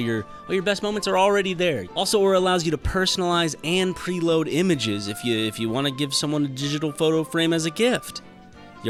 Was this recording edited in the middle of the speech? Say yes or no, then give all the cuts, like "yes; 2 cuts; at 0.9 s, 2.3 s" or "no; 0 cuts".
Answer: no; 0 cuts